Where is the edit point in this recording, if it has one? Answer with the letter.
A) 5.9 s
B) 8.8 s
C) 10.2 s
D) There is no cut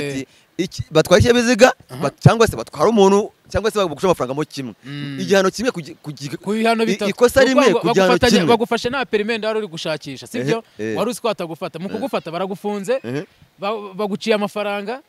D